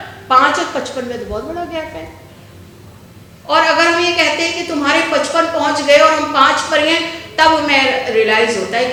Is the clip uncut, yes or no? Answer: yes